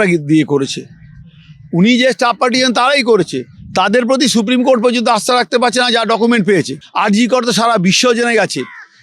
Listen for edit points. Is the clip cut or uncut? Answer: cut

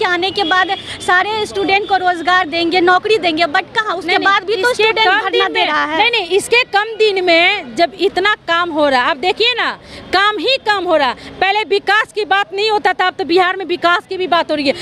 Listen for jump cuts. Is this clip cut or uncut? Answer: uncut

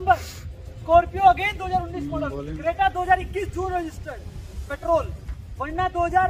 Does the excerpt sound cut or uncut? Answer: uncut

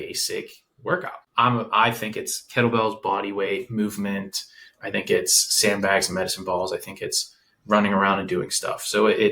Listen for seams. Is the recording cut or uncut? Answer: uncut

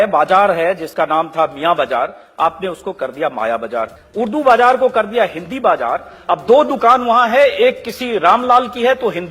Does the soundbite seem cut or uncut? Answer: cut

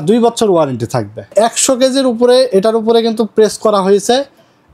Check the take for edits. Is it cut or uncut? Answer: cut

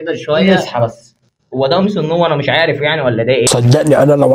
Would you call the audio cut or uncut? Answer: cut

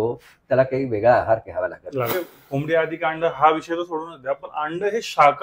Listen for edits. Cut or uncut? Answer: cut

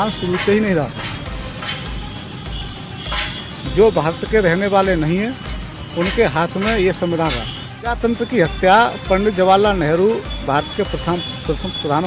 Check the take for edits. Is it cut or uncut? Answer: cut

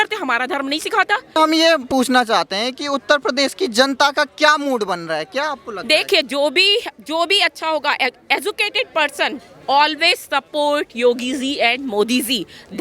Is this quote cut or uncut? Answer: uncut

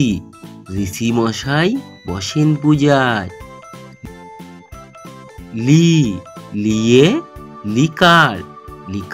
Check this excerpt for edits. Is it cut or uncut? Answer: uncut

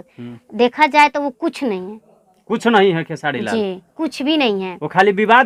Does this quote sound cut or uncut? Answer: uncut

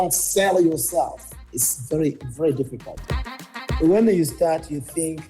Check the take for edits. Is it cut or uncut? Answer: cut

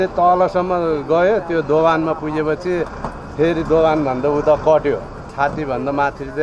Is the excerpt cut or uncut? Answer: cut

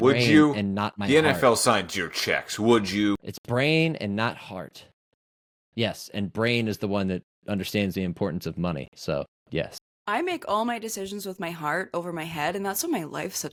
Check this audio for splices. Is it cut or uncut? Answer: uncut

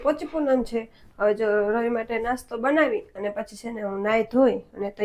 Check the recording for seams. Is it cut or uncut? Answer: uncut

